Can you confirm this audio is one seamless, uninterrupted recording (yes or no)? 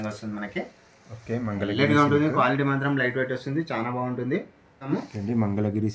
no